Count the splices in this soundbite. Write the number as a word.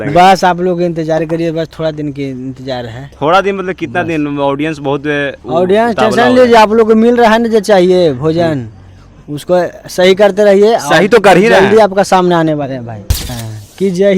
one